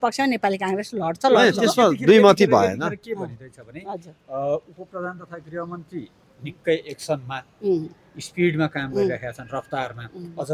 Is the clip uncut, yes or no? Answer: yes